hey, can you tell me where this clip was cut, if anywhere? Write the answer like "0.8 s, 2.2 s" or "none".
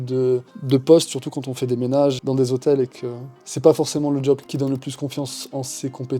2.2 s, 4.5 s